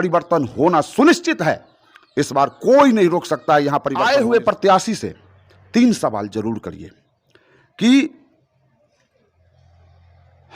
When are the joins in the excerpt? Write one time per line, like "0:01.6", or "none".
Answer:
0:03.9